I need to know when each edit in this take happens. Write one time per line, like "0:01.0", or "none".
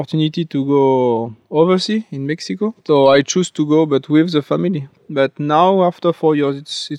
0:04.9